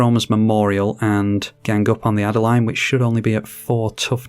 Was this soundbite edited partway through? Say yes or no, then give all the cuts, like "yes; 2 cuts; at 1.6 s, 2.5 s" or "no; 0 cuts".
yes; 1 cut; at 1.5 s